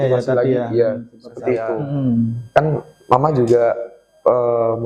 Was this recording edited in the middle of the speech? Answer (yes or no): yes